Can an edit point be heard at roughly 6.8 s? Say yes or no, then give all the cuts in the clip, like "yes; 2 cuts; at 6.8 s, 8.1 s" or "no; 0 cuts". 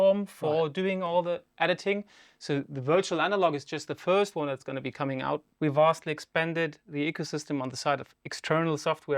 no; 1 cut; at 5.5 s